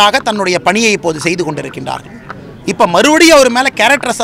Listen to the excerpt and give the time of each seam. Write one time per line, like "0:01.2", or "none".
none